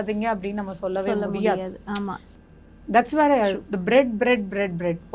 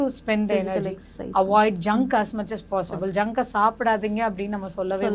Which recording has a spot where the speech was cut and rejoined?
first; 1 cut; at 2.3 s

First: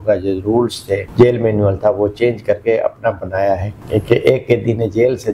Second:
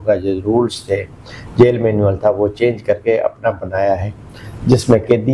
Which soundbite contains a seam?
first; 2 cuts; at 1.1 s, 3.7 s

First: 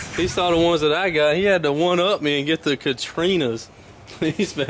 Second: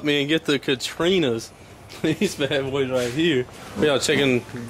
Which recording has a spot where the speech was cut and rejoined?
second; 1 cut; at 3.6 s

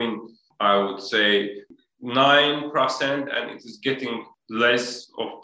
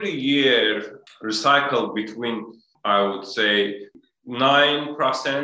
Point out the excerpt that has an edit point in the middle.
first; 1 cut; at 4.3 s

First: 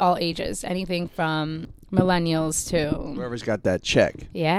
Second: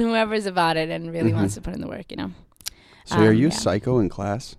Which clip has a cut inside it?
first; 1 cut; at 1.7 s

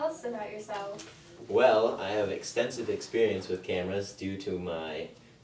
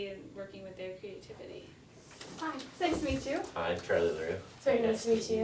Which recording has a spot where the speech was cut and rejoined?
second; 1 cut; at 2.2 s

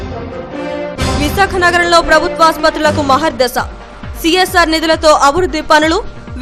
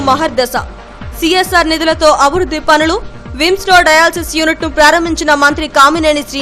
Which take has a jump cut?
first; 1 cut; at 0.9 s

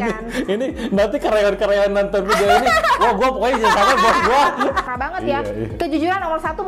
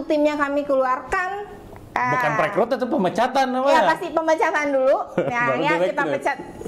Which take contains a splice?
first; 1 cut; at 4.9 s

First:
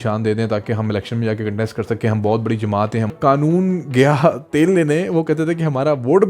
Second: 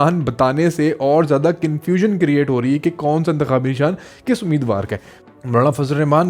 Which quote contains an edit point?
first; 1 cut; at 3.1 s

